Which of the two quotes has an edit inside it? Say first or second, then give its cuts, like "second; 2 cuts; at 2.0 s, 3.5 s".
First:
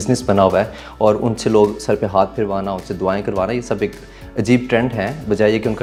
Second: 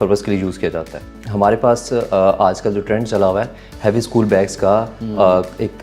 second; 1 cut; at 1.0 s